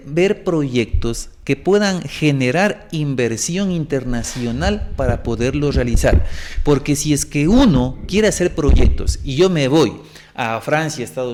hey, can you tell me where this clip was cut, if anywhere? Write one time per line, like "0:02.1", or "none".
none